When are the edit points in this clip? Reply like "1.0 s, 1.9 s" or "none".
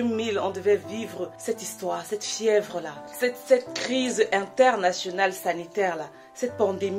none